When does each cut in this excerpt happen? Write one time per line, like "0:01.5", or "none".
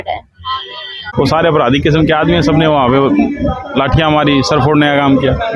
0:01.1